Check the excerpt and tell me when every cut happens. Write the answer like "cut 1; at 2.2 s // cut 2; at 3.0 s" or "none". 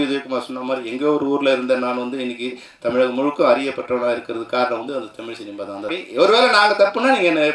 cut 1; at 5.9 s